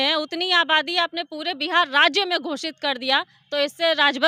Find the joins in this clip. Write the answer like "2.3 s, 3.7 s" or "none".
none